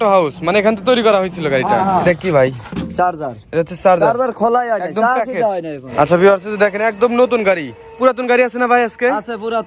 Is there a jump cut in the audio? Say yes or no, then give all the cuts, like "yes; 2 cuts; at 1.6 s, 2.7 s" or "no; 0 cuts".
yes; 2 cuts; at 2.0 s, 5.8 s